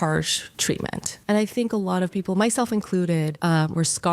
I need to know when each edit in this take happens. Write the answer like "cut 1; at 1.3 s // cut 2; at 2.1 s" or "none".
cut 1; at 1.0 s // cut 2; at 3.3 s

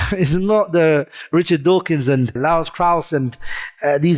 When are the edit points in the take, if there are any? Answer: cut 1; at 2.4 s

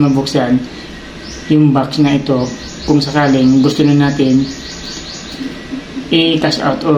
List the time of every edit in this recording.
none

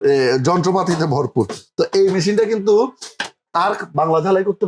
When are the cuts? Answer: none

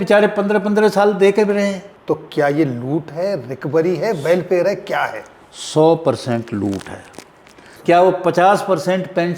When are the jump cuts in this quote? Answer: cut 1; at 1.9 s // cut 2; at 7.7 s

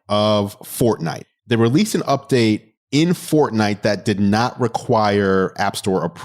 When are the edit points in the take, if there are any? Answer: cut 1; at 1.1 s // cut 2; at 2.7 s

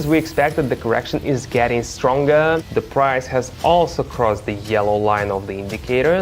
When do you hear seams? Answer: cut 1; at 2.7 s

